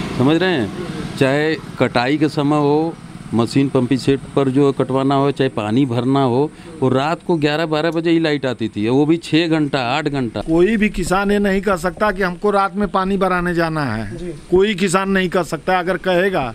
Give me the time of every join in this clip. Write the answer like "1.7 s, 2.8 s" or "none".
10.4 s